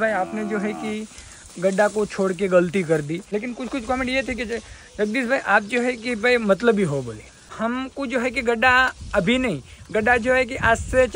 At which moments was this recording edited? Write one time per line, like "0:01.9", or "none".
0:03.2
0:07.5